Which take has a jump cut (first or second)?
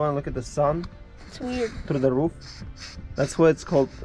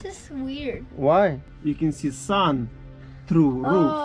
second